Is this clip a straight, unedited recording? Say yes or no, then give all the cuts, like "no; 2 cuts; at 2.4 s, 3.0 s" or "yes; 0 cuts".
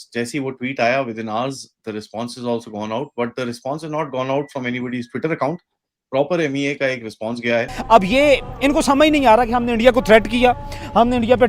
no; 1 cut; at 7.8 s